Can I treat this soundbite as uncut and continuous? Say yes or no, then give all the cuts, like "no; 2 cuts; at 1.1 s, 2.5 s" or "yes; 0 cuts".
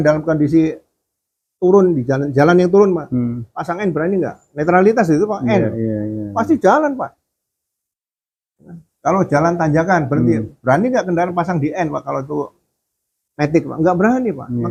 yes; 0 cuts